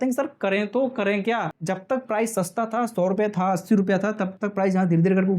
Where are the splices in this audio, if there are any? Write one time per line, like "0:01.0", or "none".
0:01.6